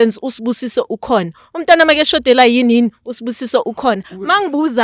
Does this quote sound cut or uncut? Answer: uncut